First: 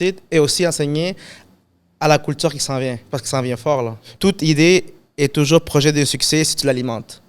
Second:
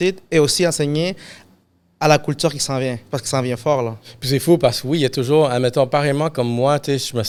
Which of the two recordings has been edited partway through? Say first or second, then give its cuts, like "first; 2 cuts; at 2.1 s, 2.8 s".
first; 1 cut; at 4.0 s